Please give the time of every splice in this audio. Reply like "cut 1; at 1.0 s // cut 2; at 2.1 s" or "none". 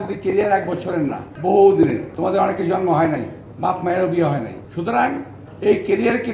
cut 1; at 1.3 s // cut 2; at 2.1 s // cut 3; at 4.6 s